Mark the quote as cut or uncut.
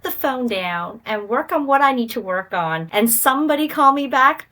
cut